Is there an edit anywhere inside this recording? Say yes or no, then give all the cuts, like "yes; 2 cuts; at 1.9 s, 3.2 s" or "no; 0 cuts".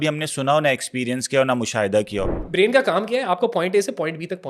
yes; 1 cut; at 2.4 s